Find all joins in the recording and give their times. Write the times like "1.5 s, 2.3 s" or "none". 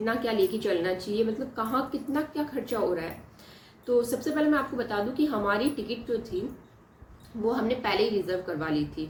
none